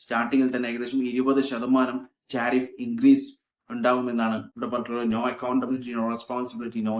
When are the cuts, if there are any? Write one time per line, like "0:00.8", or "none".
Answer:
0:04.5